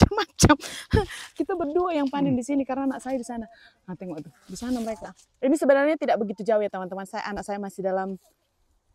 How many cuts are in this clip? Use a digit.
0